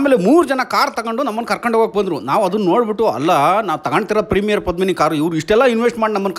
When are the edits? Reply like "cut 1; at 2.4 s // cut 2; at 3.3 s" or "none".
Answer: none

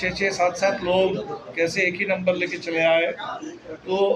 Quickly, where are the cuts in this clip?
none

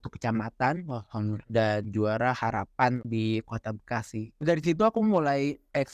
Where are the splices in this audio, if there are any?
cut 1; at 1.4 s // cut 2; at 3.1 s

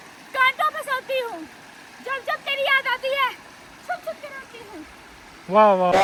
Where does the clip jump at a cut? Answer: none

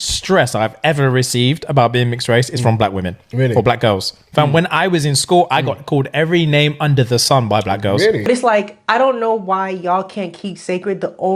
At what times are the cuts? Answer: cut 1; at 8.3 s

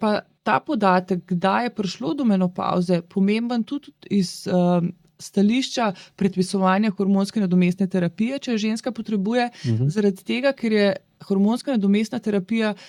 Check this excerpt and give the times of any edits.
none

